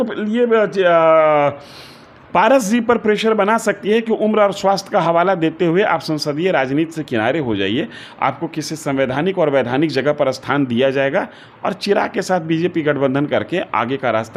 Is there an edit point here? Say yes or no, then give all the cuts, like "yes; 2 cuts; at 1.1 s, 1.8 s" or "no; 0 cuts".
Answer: no; 0 cuts